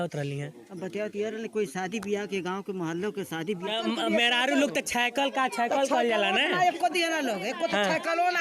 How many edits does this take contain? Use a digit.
1